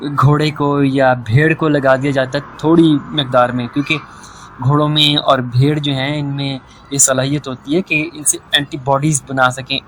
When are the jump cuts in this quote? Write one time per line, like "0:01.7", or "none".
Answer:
none

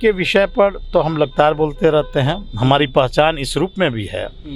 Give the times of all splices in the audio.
none

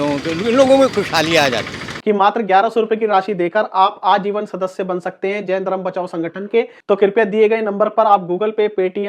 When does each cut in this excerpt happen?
0:01.9

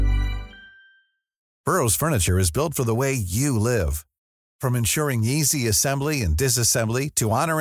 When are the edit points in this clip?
0:01.5

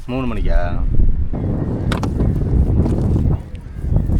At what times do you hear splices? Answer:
0:01.3

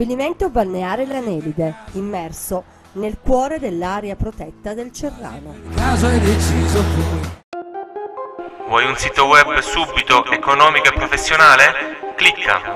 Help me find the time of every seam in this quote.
0:07.4

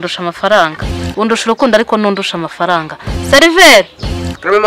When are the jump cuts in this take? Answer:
none

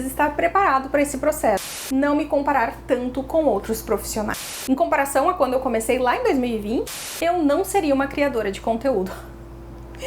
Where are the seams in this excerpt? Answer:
0:01.9
0:04.5
0:06.9

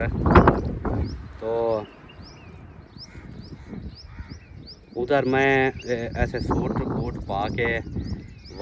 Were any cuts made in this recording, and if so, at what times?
none

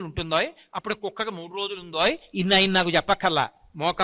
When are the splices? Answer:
none

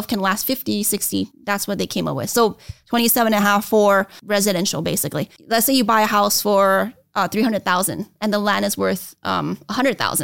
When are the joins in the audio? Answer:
0:01.4
0:04.2
0:05.3

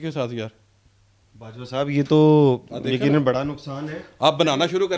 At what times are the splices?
none

